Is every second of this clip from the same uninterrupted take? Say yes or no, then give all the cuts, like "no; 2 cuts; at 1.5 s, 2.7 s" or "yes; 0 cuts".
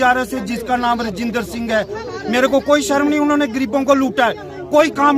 yes; 0 cuts